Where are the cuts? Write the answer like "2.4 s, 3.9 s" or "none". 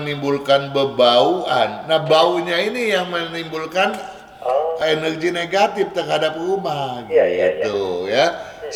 none